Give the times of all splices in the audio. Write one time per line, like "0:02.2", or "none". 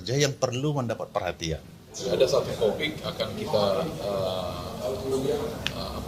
0:02.0